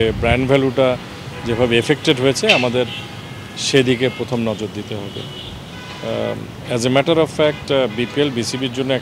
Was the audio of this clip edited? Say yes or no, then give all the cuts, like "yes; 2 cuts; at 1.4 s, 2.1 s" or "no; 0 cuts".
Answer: no; 0 cuts